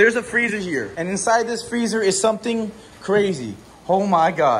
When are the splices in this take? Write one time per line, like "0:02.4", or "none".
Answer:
0:00.9